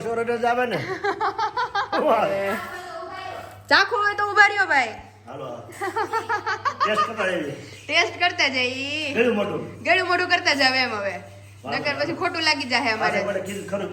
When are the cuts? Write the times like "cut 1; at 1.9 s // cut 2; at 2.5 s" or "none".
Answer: cut 1; at 2.3 s